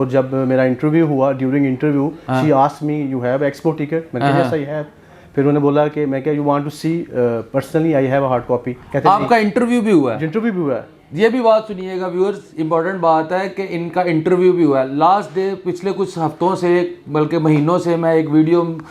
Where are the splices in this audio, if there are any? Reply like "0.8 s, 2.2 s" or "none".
none